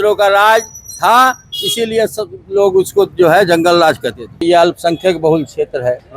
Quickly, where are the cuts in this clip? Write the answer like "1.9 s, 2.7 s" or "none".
4.3 s